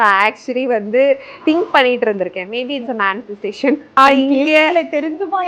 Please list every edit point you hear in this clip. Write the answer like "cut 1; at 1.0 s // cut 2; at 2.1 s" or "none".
cut 1; at 1.3 s // cut 2; at 4.0 s